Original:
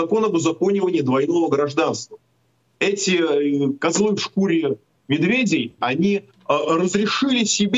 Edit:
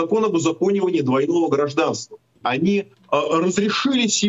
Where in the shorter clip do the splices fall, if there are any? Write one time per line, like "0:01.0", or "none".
0:02.4